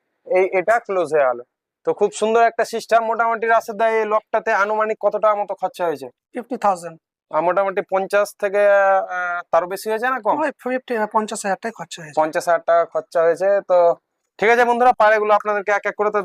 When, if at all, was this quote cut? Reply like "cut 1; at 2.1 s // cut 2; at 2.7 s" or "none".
none